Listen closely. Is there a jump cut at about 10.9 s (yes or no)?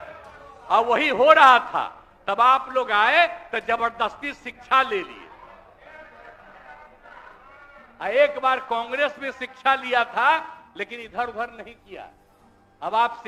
no